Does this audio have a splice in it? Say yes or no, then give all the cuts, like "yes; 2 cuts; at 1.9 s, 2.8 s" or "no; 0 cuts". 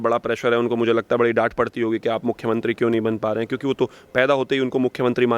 no; 0 cuts